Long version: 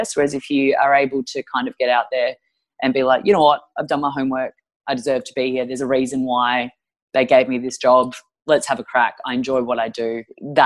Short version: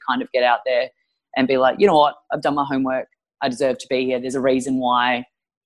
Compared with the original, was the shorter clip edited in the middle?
no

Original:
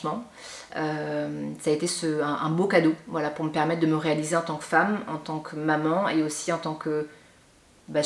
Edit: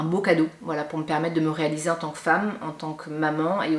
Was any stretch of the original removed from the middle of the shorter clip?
no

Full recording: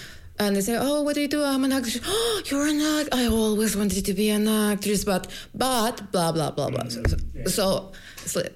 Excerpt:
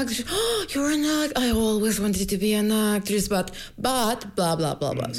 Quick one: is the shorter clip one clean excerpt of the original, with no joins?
yes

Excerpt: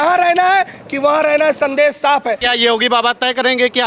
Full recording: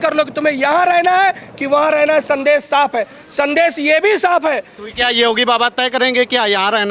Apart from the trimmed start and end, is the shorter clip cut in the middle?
yes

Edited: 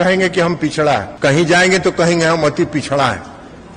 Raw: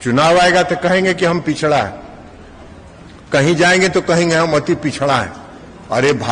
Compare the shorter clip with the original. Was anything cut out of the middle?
yes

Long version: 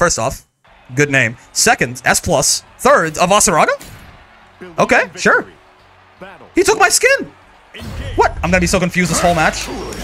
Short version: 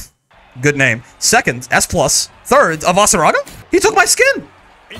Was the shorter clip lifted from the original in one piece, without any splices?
no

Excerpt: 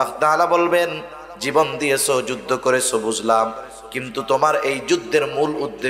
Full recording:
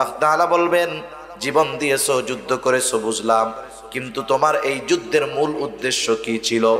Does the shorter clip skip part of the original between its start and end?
no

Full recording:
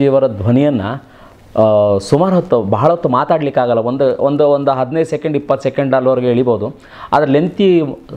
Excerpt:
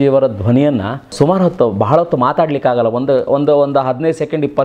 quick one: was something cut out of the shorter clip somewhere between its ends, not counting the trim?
yes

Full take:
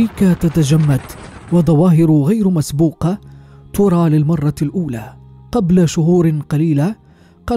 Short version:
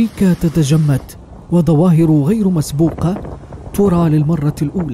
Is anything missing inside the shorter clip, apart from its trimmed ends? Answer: no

